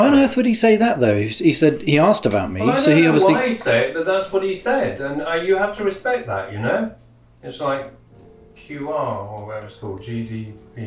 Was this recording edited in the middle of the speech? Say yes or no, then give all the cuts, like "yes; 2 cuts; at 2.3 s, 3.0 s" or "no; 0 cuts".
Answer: no; 0 cuts